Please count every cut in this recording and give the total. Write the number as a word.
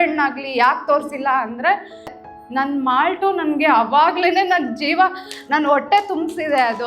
one